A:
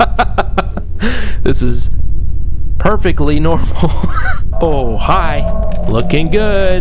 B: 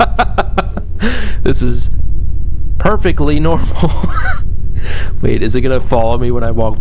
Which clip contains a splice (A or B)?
A